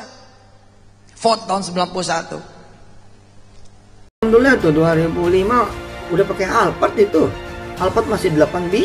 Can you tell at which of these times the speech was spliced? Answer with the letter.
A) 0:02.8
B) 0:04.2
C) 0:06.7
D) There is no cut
B